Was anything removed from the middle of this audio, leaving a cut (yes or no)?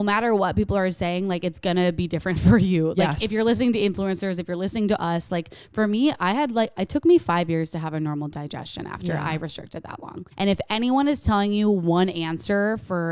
yes